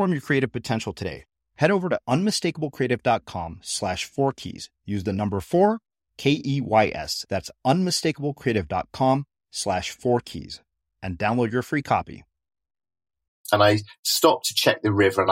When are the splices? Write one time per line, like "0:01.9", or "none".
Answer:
0:13.3